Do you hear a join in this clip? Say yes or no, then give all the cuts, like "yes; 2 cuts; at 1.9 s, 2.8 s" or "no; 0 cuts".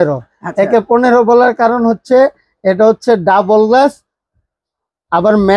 no; 0 cuts